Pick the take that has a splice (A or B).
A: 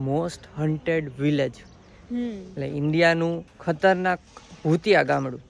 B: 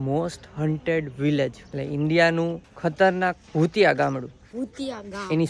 B